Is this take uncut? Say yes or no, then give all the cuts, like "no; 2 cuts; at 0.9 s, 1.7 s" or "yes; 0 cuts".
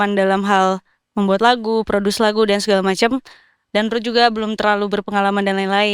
yes; 0 cuts